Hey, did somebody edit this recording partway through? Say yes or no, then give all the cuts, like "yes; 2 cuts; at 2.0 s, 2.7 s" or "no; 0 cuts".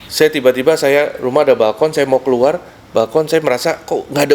no; 0 cuts